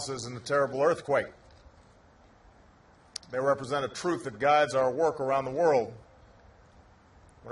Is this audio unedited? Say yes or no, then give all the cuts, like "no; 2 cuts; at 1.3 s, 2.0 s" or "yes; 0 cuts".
yes; 0 cuts